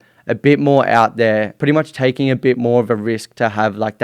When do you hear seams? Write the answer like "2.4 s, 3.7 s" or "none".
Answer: 1.5 s